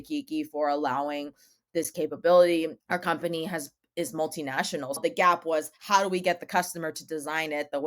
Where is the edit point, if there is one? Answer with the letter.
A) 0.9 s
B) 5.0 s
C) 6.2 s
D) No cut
B